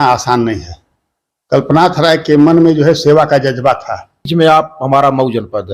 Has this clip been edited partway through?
yes; 1 cut; at 4.3 s

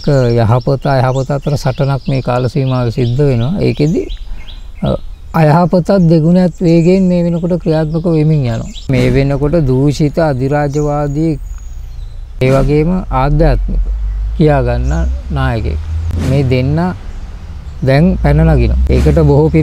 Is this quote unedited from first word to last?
no; 3 cuts; at 8.9 s, 12.4 s, 18.8 s

